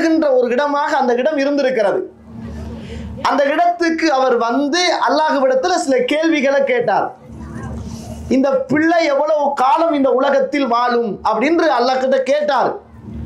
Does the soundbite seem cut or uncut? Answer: uncut